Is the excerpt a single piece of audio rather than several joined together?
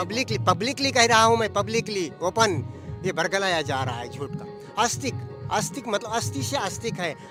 yes; 0 cuts

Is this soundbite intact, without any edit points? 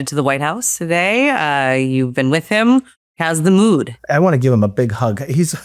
no; 2 cuts; at 3.1 s, 4.0 s

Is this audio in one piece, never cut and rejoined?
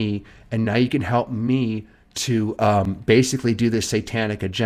yes; 0 cuts

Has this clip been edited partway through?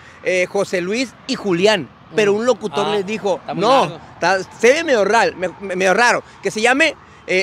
no; 0 cuts

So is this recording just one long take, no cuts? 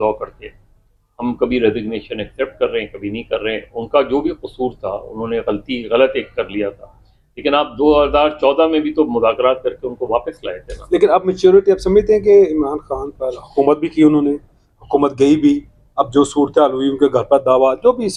yes; 0 cuts

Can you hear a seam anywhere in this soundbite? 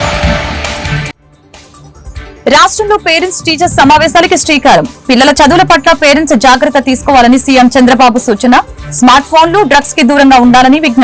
yes; 1 cut; at 2.3 s

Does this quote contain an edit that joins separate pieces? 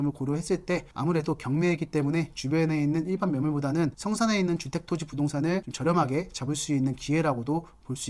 no; 0 cuts

